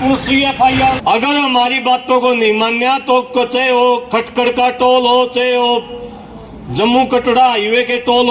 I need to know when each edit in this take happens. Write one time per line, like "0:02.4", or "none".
0:01.0